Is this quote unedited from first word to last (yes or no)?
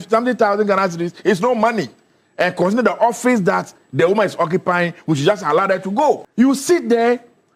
yes